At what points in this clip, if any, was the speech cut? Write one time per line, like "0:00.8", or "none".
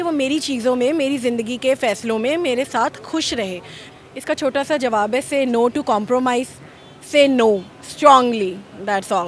0:03.8